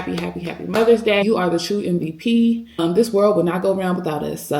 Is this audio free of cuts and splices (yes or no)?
no